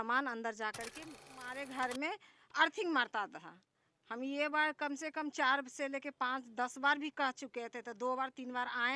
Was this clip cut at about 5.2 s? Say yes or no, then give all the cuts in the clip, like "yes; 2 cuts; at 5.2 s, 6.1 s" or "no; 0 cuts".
no; 1 cut; at 1.3 s